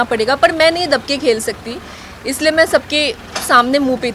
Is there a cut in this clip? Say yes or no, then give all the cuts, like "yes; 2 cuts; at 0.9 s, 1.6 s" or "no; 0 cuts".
no; 0 cuts